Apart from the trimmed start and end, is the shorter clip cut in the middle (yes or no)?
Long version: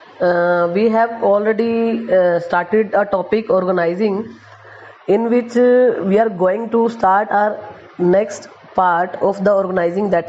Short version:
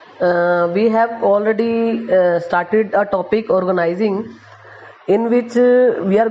no